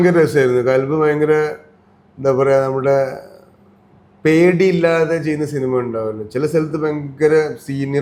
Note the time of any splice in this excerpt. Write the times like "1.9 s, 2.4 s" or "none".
none